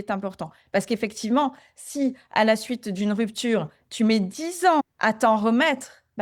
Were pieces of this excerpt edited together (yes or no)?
no